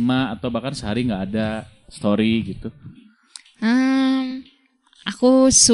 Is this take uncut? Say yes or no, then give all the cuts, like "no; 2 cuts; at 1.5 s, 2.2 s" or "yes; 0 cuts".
yes; 0 cuts